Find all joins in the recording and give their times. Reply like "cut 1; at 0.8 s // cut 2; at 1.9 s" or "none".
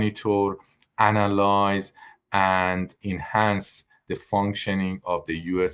cut 1; at 2.9 s